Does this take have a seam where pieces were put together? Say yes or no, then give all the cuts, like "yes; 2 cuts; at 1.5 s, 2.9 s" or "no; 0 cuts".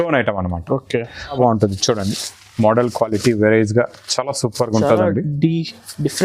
yes; 1 cut; at 1.3 s